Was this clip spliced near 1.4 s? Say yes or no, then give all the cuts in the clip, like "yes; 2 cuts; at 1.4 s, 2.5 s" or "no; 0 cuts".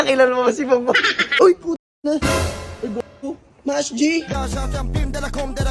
yes; 1 cut; at 1.4 s